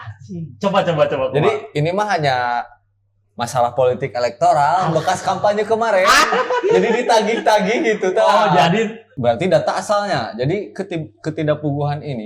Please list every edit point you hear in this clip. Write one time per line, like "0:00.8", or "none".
0:09.0